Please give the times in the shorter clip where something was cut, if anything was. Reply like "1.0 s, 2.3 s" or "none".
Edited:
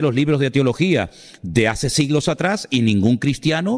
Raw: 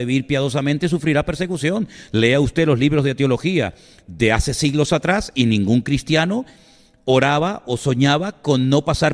none